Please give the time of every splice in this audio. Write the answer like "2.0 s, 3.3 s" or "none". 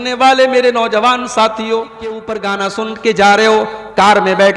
2.4 s